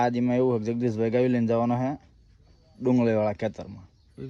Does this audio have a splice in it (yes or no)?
no